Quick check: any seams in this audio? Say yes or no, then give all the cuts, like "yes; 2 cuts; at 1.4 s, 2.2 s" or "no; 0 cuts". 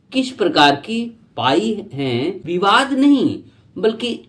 yes; 1 cut; at 2.4 s